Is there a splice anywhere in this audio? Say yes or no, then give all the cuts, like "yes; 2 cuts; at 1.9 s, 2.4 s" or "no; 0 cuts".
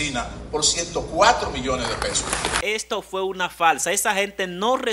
yes; 1 cut; at 2.6 s